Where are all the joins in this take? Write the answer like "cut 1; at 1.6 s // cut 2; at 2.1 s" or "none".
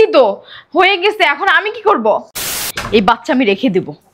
cut 1; at 2.6 s